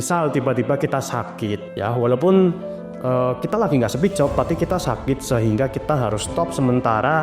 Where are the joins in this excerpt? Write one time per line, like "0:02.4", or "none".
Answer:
0:01.7